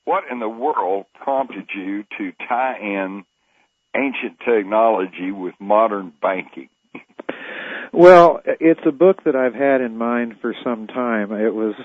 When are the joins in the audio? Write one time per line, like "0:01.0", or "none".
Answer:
0:04.0